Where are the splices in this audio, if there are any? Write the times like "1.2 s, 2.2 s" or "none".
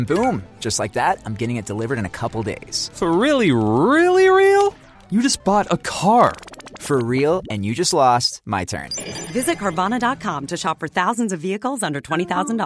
none

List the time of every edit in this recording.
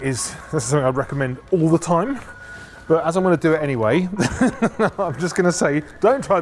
none

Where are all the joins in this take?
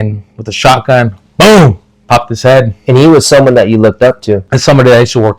1.9 s, 4.5 s

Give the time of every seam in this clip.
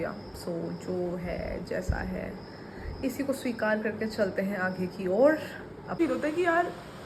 6.0 s

